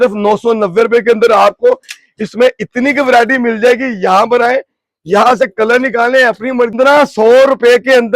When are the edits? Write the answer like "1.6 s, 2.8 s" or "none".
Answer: 6.7 s